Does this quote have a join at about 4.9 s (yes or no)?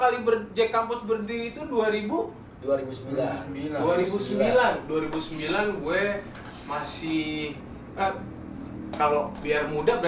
no